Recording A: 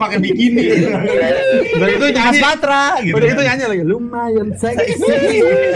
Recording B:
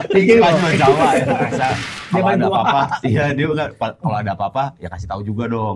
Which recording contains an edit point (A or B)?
B